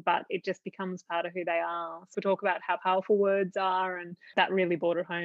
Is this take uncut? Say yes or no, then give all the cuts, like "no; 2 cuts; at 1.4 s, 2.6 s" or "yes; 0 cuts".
no; 2 cuts; at 2.1 s, 4.3 s